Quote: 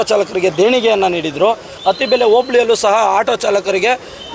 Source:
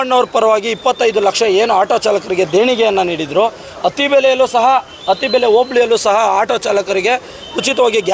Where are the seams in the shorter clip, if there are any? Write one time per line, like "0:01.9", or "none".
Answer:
0:01.7